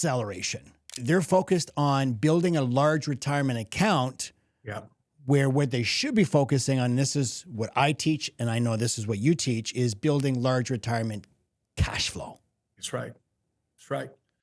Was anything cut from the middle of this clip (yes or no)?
yes